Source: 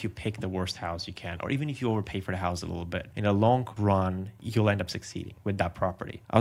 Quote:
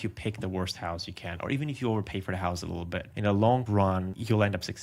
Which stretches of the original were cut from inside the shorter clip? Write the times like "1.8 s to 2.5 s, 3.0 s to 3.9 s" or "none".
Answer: 3.8 s to 4.1 s